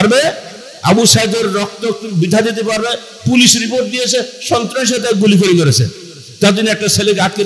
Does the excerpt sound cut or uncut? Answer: uncut